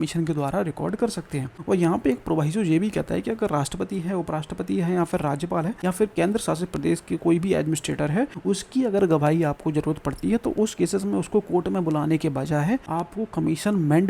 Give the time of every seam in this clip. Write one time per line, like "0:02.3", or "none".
0:01.5
0:06.0
0:08.4
0:12.9